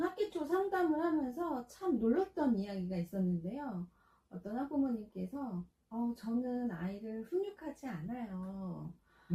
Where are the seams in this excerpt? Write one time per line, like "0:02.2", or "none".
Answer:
none